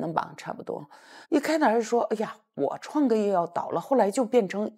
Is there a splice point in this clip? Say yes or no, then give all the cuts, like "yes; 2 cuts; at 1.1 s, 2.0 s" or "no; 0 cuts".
yes; 1 cut; at 1.1 s